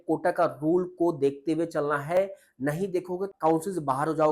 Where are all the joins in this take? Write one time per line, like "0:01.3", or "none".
0:03.3